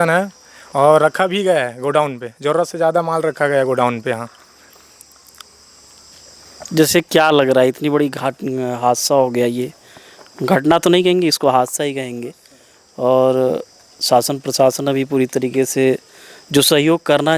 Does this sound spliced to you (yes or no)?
no